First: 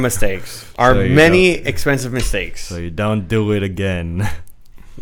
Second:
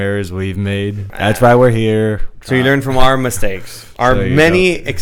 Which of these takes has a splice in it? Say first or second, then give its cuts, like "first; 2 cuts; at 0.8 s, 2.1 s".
second; 2 cuts; at 1.1 s, 2.3 s